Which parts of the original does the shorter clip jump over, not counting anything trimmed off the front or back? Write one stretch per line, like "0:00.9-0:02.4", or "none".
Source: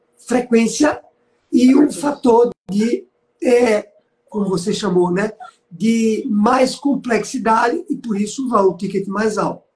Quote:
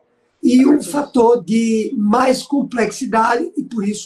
0:02.5-0:05.8